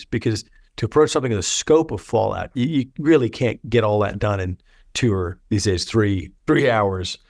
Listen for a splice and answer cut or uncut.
cut